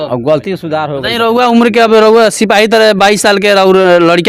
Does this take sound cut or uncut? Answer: cut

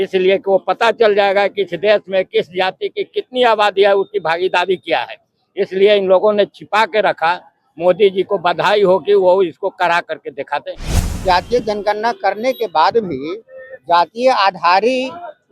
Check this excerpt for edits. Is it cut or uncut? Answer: cut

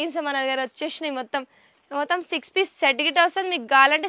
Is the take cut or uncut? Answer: uncut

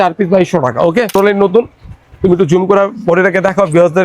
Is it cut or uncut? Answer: cut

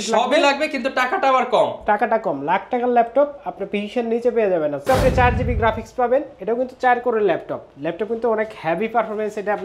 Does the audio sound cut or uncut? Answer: cut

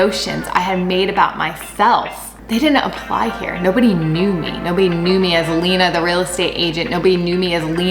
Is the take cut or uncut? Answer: uncut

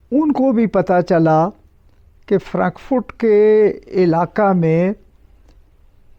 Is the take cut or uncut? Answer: uncut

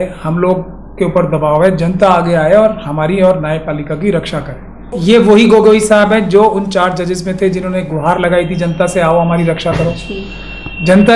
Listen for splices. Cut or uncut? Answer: cut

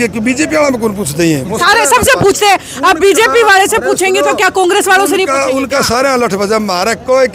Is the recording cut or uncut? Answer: uncut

